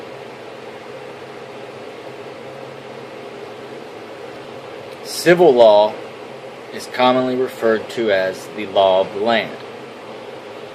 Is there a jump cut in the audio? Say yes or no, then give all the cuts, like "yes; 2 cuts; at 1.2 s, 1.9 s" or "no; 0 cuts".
yes; 1 cut; at 7.6 s